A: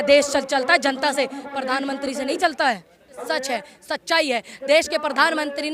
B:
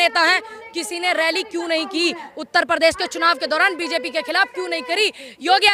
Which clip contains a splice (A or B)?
A